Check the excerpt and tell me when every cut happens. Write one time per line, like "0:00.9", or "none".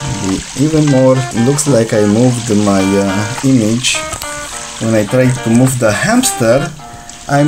0:01.3